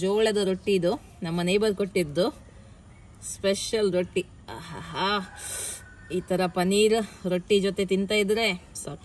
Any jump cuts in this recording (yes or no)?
no